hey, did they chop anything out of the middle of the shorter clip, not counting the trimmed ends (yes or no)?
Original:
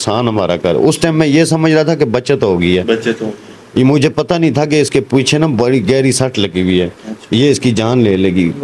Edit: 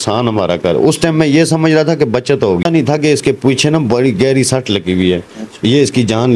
yes